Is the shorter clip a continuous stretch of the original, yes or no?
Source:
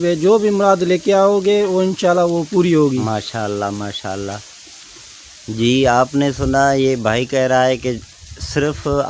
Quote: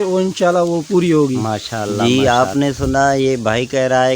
no